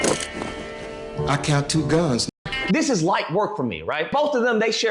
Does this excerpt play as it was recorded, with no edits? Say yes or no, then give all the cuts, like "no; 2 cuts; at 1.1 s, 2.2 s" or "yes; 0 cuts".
no; 2 cuts; at 2.4 s, 4.1 s